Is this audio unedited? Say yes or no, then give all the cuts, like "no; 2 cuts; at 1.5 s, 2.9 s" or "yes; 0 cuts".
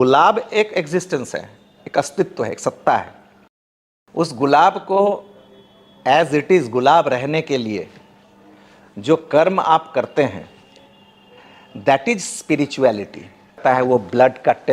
no; 1 cut; at 13.6 s